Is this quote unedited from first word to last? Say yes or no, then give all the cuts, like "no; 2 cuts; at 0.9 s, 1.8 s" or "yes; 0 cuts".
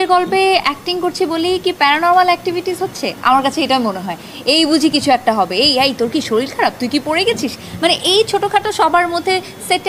yes; 0 cuts